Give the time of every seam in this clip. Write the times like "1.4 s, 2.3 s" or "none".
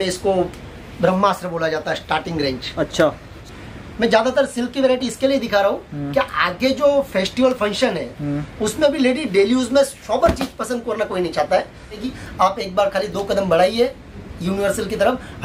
3.4 s, 12.1 s